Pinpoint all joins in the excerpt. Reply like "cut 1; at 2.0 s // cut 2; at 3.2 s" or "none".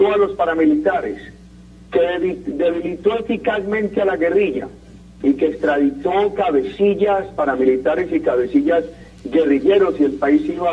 none